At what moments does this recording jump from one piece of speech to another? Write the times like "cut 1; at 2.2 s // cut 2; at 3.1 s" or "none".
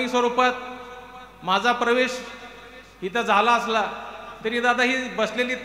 none